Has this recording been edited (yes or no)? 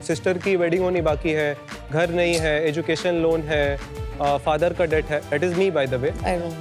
no